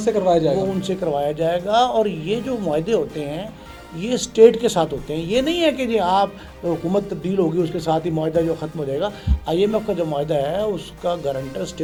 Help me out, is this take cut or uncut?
uncut